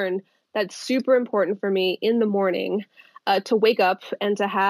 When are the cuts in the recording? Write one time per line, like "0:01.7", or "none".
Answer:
none